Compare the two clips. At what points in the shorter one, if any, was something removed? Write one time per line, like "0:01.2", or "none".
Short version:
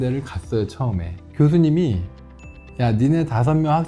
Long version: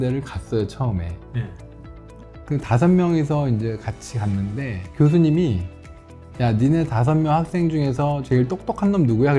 0:01.2